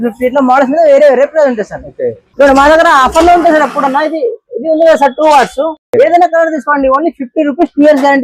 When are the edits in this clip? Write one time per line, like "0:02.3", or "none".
0:02.2